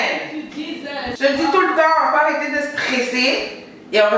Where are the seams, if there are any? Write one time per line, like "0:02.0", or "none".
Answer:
0:01.0

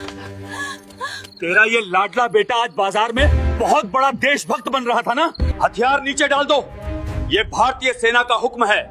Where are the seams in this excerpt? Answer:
0:05.6

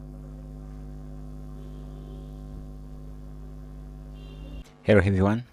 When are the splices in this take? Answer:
0:04.6

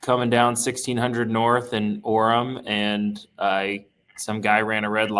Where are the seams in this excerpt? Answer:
none

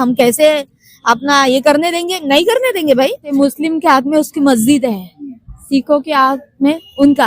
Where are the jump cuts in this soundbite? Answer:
0:03.3

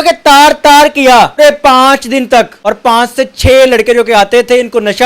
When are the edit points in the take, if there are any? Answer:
0:01.4
0:02.6

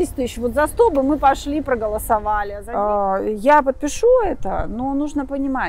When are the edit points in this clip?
0:02.6

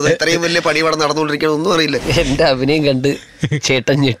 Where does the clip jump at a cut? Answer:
0:02.0

